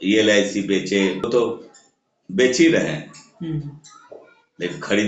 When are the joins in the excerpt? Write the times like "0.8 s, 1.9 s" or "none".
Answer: 1.3 s